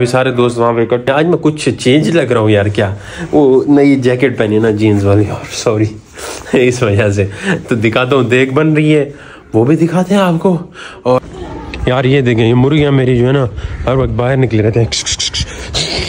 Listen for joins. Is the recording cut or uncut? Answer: cut